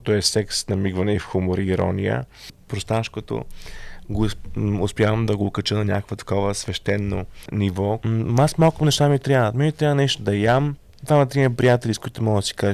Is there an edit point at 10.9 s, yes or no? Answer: yes